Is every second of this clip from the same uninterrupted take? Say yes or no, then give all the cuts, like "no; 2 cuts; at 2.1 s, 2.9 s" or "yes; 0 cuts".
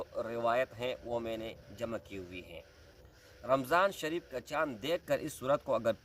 yes; 0 cuts